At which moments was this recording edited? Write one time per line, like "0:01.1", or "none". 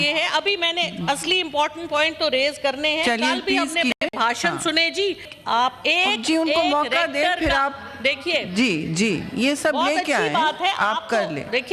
0:05.4